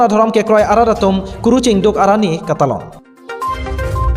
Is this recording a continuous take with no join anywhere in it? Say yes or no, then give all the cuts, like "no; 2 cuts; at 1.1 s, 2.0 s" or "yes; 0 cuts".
yes; 0 cuts